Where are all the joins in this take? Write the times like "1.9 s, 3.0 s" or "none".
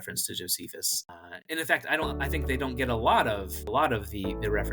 1.2 s, 3.5 s